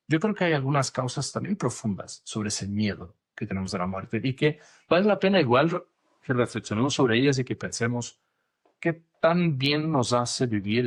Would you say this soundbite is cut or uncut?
uncut